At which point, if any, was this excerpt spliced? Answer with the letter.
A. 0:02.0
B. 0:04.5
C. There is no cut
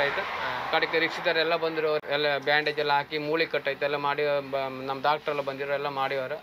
A